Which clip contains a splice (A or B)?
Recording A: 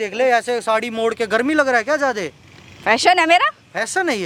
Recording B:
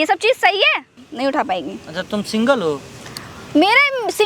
B